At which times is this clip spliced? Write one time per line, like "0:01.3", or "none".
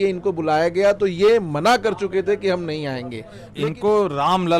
0:03.4